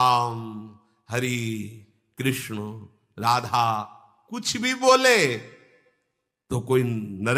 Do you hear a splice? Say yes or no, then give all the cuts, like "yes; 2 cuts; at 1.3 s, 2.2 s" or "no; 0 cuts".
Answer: no; 0 cuts